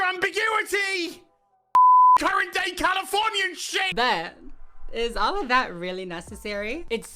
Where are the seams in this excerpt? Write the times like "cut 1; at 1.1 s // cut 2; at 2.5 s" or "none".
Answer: cut 1; at 3.9 s

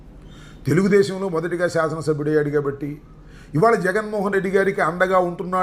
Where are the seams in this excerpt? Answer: none

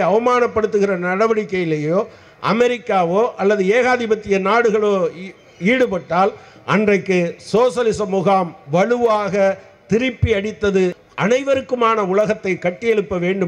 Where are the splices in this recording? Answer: cut 1; at 11.0 s

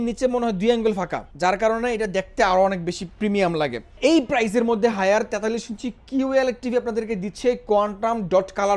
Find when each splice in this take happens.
cut 1; at 1.2 s // cut 2; at 3.9 s

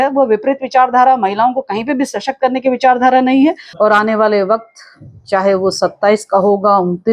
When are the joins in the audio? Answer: cut 1; at 3.7 s

